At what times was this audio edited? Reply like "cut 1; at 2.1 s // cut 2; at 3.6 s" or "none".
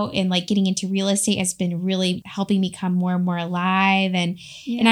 cut 1; at 2.2 s